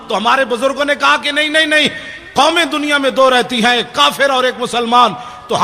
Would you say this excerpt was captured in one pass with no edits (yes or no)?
yes